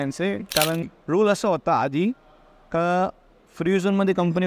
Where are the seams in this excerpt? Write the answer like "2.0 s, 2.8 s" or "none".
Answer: 0.9 s